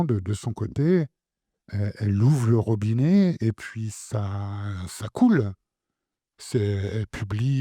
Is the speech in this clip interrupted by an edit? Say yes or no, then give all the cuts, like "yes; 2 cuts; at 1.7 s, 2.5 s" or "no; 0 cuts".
no; 0 cuts